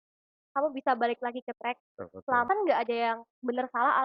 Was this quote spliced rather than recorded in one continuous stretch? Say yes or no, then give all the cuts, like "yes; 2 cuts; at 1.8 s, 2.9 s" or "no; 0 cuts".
yes; 1 cut; at 2.5 s